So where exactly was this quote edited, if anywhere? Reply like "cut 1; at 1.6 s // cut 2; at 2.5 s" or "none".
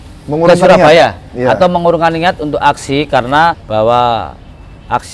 cut 1; at 3.6 s